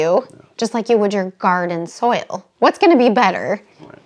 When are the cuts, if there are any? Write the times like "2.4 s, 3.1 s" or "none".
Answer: 2.5 s